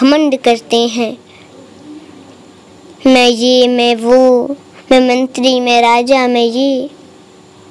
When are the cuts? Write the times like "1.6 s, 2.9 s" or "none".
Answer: none